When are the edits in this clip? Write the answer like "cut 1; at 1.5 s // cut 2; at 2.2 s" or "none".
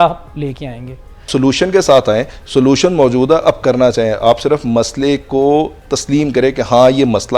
cut 1; at 1.3 s